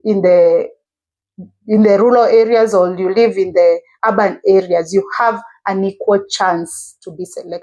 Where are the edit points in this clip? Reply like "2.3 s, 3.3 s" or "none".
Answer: none